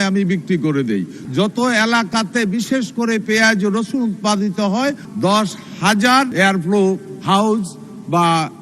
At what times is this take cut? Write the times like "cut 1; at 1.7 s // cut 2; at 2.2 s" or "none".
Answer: cut 1; at 1.2 s // cut 2; at 5.1 s // cut 3; at 6.3 s